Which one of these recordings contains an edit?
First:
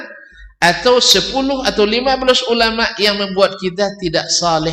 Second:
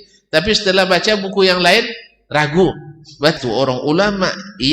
second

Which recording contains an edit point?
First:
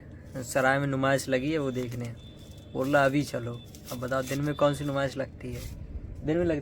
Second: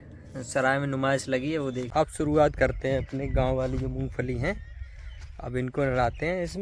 second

